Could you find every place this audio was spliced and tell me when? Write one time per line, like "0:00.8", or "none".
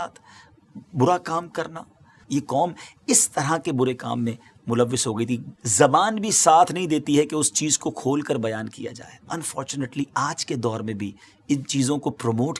0:02.1
0:05.5
0:09.3